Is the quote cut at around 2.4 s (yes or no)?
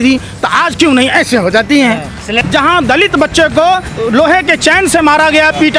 yes